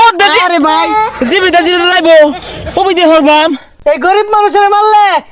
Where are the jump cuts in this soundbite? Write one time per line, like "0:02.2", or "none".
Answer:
0:03.7